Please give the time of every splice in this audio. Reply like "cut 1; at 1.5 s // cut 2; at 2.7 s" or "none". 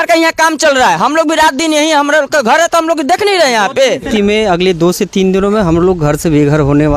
cut 1; at 4.1 s